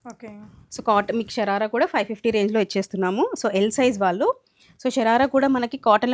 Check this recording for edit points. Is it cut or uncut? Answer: uncut